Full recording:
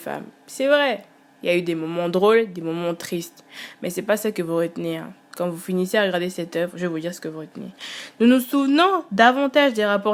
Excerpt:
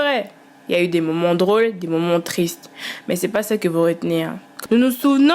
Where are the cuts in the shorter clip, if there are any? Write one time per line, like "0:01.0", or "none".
0:04.4